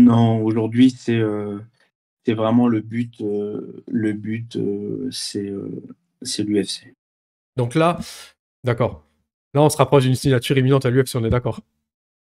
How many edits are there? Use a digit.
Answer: 0